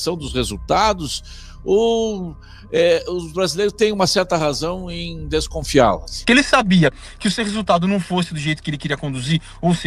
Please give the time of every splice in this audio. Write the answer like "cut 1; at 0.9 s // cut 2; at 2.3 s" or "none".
cut 1; at 6.2 s